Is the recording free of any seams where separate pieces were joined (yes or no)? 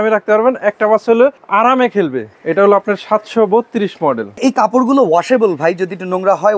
no